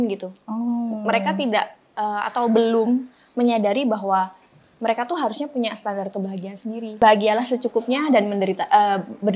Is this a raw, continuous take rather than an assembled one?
no; 1 cut; at 7.0 s

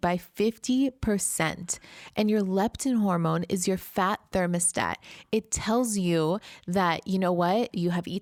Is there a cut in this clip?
no; 0 cuts

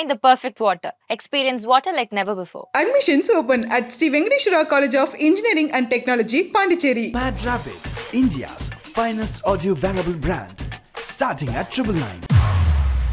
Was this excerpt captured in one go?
yes; 0 cuts

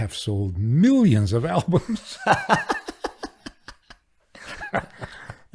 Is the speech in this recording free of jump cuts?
yes; 0 cuts

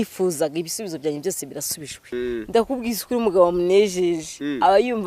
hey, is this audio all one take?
no; 1 cut; at 2.1 s

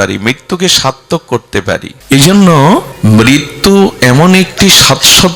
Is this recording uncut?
no; 2 cuts; at 1.9 s, 2.9 s

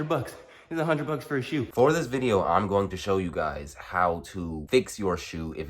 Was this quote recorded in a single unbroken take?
no; 1 cut; at 1.7 s

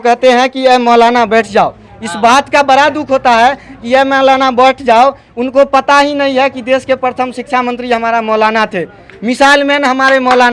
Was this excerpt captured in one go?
yes; 0 cuts

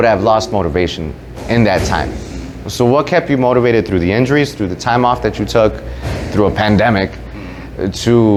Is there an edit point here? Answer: no; 0 cuts

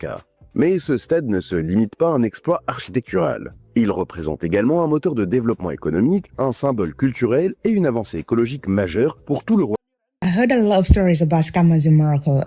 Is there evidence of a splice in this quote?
yes; 1 cut; at 10.2 s

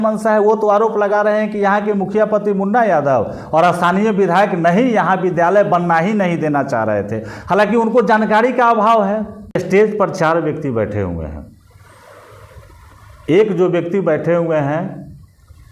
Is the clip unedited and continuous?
no; 1 cut; at 9.6 s

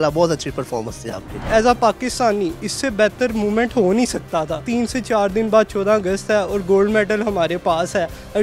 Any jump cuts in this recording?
yes; 2 cuts; at 1.5 s, 4.6 s

